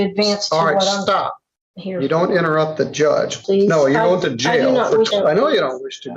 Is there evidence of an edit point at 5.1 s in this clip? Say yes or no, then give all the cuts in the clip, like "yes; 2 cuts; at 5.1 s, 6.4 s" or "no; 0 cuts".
yes; 2 cuts; at 3.4 s, 5.1 s